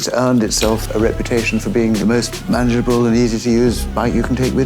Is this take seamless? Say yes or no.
no